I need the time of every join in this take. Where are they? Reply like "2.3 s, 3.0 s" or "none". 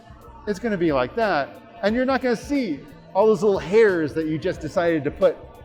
none